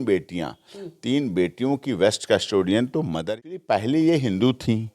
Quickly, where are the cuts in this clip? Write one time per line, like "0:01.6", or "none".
0:03.3